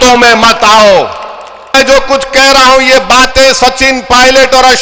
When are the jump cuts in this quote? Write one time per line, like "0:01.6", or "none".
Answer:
0:01.7